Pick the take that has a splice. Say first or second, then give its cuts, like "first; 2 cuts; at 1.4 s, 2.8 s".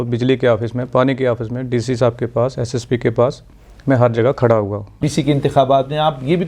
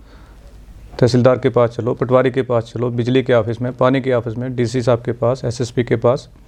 first; 1 cut; at 5.1 s